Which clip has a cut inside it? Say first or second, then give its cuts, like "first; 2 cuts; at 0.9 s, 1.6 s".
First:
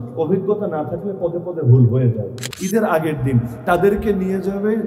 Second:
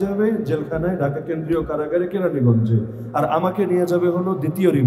first; 1 cut; at 2.5 s